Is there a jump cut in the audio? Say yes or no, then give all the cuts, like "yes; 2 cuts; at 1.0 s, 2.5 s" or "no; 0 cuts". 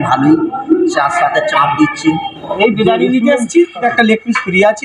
yes; 2 cuts; at 2.4 s, 3.9 s